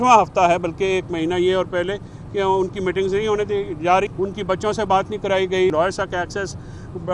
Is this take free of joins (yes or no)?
no